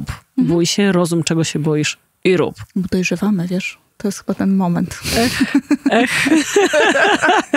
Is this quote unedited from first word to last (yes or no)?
yes